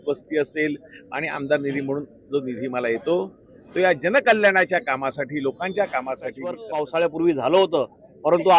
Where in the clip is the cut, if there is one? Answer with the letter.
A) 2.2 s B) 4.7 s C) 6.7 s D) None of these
C